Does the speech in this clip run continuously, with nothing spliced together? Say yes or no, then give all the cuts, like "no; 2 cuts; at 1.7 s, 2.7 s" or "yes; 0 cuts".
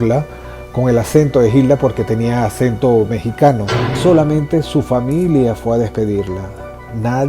no; 1 cut; at 4.0 s